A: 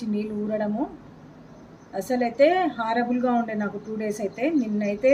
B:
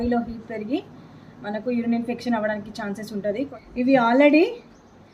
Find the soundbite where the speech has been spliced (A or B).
B